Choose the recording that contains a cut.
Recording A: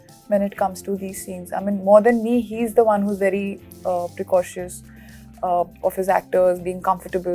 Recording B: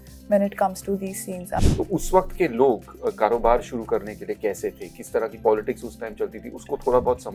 B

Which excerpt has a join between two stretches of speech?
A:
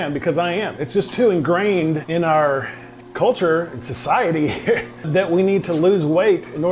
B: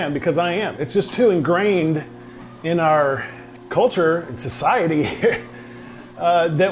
A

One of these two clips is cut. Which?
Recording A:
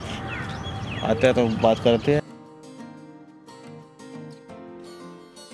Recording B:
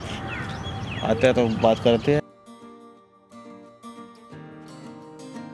A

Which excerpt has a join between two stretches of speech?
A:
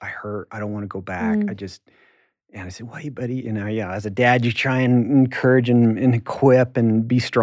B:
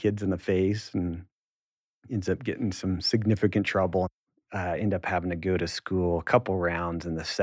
B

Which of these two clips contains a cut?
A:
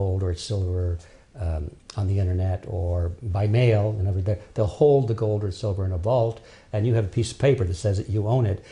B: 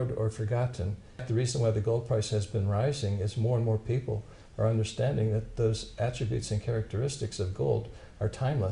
A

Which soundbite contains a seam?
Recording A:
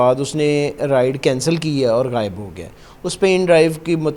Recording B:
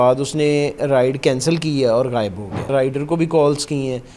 B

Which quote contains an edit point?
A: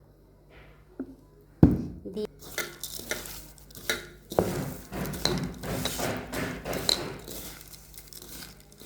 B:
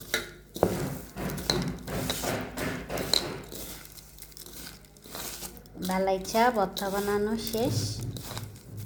A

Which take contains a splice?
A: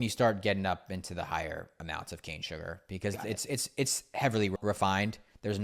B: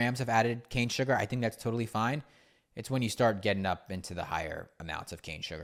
A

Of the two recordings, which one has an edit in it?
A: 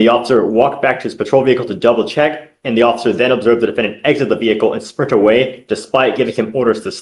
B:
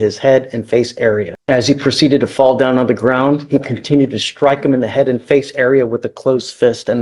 B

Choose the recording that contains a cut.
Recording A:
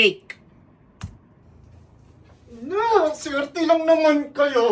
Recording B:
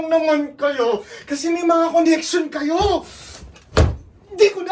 A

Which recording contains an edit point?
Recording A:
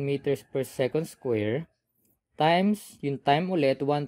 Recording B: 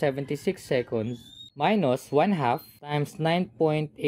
B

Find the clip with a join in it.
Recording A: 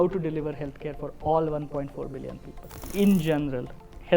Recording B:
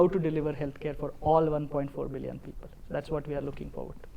A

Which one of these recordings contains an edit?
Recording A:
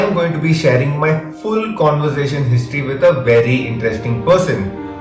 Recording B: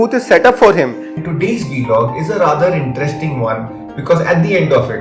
B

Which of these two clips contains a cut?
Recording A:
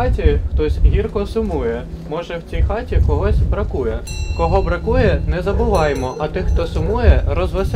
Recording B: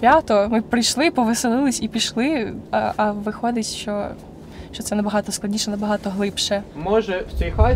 B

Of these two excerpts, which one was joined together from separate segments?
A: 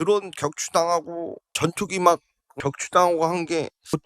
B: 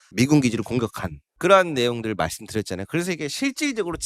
A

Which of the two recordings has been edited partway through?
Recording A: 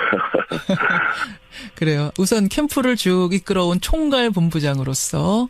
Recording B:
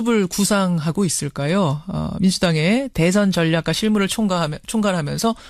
A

